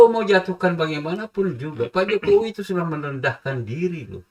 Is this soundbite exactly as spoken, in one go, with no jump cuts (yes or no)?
yes